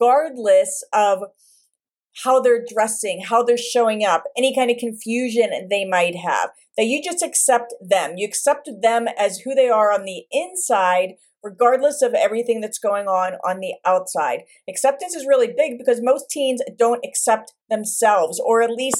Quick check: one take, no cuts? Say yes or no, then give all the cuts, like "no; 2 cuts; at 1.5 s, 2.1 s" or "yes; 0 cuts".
yes; 0 cuts